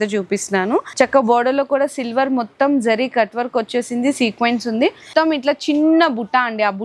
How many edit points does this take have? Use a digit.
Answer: 2